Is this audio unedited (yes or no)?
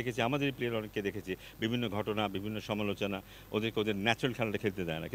yes